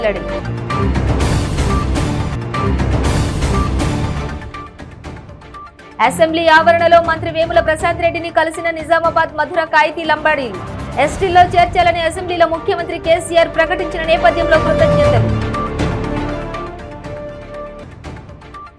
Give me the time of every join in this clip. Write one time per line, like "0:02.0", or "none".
none